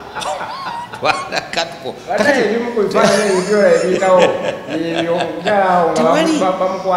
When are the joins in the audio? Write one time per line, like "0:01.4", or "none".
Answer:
none